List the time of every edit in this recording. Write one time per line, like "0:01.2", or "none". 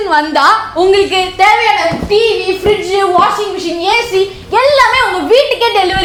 none